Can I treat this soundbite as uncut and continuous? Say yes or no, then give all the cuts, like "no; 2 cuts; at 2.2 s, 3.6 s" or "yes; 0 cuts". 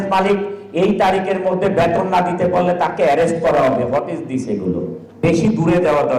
no; 1 cut; at 5.0 s